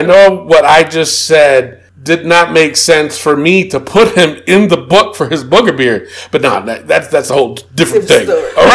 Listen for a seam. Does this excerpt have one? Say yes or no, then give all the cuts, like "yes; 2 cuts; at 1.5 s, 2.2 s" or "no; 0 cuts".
no; 0 cuts